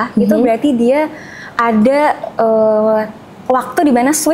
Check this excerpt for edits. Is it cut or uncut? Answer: uncut